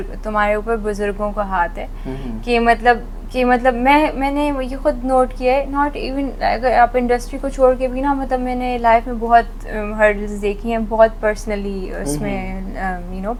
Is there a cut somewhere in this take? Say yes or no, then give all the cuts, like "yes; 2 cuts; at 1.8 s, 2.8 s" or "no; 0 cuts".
no; 0 cuts